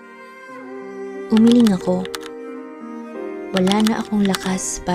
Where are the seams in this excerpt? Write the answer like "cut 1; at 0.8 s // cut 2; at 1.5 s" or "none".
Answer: none